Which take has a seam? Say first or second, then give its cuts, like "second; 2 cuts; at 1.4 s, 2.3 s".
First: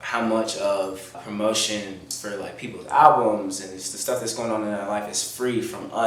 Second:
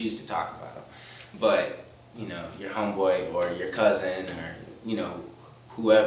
first; 1 cut; at 1.2 s